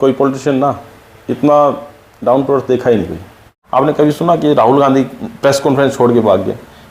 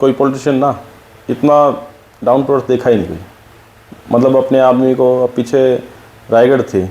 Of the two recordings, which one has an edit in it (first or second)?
first